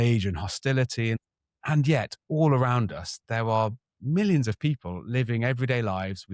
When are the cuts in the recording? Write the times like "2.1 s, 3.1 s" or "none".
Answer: 1.2 s

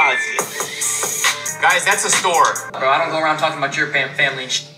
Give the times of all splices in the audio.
1.5 s, 2.6 s

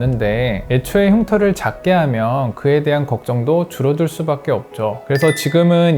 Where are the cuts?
5.0 s

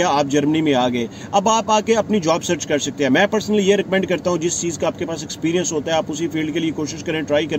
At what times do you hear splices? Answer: none

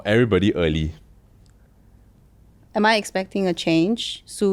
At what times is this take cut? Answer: 2.6 s

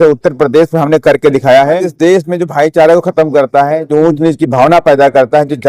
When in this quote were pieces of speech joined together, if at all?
1.9 s

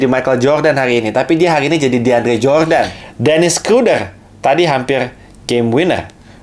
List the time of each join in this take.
3.0 s

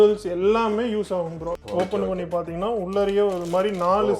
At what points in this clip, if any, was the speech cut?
1.6 s

